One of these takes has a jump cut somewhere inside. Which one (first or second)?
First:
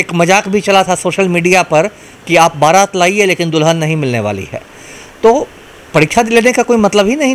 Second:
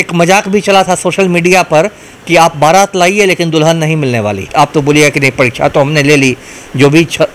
second